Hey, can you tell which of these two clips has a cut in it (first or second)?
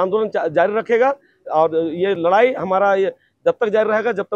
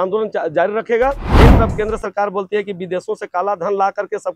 second